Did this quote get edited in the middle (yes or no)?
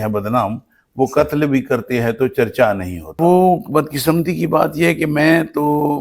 yes